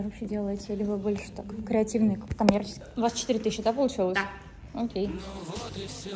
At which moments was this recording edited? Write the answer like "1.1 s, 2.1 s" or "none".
2.8 s, 5.1 s